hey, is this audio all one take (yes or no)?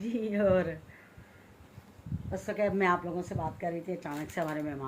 yes